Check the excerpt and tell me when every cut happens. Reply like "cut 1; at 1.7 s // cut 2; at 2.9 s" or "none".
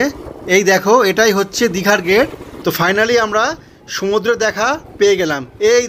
cut 1; at 2.5 s